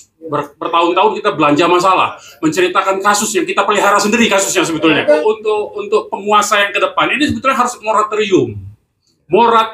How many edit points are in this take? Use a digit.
1